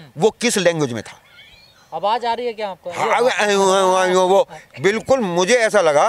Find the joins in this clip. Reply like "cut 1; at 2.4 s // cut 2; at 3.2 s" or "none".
none

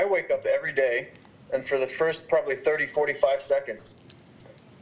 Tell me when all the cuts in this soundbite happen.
none

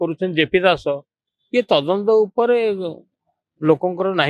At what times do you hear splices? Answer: none

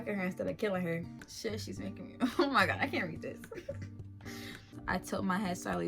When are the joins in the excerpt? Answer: cut 1; at 1.2 s // cut 2; at 4.7 s

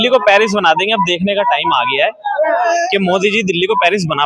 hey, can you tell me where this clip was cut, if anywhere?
none

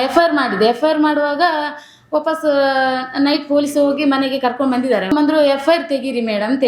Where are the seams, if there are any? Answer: cut 1; at 5.1 s

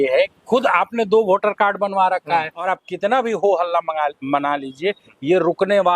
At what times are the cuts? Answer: cut 1; at 2.7 s

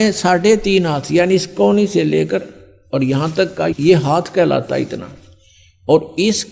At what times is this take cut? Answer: none

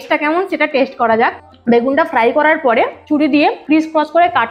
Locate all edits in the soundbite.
cut 1; at 1.5 s // cut 2; at 3.5 s

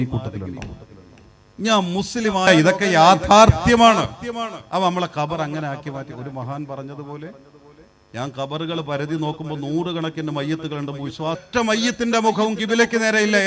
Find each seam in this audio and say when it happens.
cut 1; at 2.5 s // cut 2; at 11.4 s

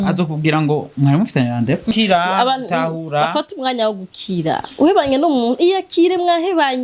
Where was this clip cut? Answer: cut 1; at 1.9 s

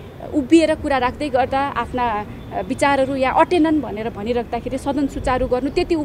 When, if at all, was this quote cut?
none

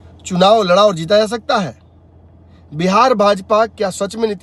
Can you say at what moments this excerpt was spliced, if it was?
none

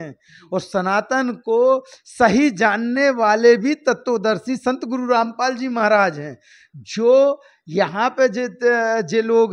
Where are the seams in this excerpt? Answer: none

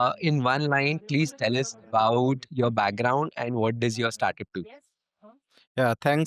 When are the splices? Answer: none

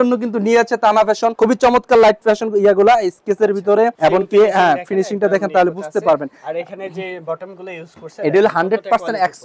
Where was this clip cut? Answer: none

